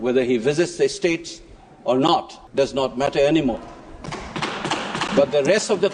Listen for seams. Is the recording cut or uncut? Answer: cut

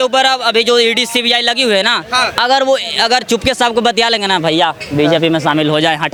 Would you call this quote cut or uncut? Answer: uncut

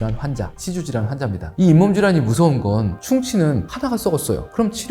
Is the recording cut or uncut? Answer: cut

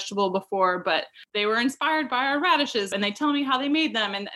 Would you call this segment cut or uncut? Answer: cut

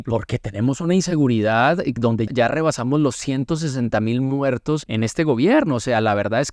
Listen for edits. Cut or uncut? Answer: cut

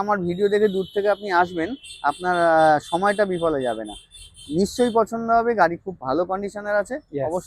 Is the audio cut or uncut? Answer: uncut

